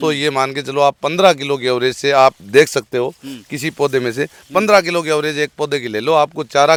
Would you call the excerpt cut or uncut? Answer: uncut